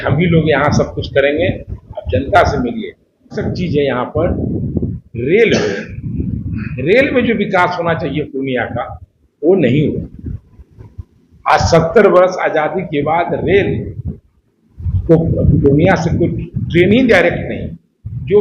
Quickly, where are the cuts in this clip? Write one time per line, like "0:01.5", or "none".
0:03.4